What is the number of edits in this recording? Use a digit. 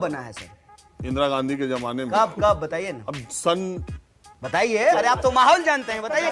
0